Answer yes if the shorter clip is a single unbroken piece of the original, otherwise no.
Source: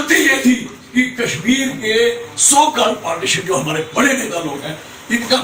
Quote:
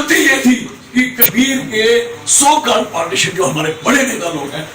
no